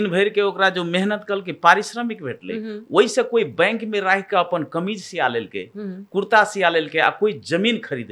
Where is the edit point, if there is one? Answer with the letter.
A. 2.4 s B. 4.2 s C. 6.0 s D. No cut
D